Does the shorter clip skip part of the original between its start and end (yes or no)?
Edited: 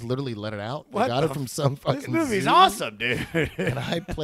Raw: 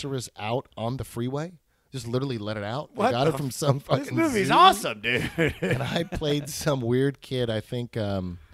no